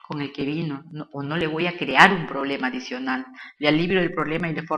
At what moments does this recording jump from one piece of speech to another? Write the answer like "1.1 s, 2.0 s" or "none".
none